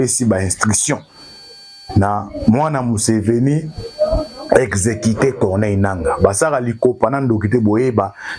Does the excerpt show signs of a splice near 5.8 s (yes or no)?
no